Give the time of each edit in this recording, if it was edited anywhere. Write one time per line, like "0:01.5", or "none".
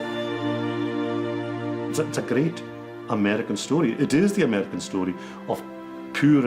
0:01.9